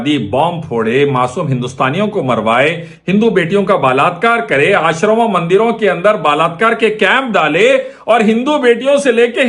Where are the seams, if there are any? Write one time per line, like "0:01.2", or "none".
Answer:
none